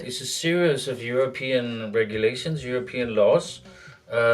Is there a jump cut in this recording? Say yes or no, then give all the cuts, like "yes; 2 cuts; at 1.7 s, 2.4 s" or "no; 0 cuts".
no; 0 cuts